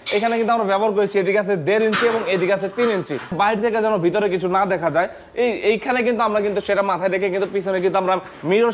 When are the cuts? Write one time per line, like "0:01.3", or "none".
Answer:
0:03.3